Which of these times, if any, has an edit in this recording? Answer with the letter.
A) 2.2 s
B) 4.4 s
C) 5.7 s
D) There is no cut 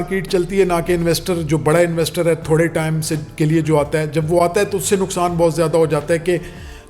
D